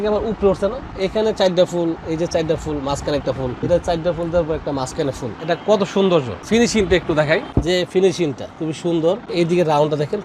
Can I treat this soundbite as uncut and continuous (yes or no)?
no